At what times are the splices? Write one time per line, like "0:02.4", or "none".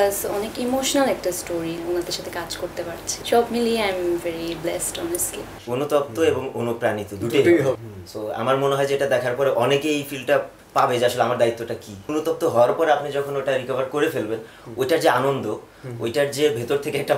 0:01.8
0:05.5
0:07.9
0:12.1